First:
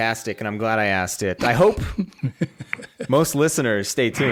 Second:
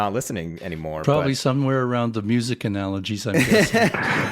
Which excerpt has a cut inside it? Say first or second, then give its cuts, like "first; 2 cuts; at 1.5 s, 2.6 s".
second; 1 cut; at 1.0 s